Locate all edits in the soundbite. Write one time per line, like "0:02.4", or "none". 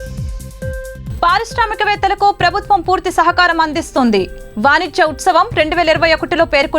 0:01.0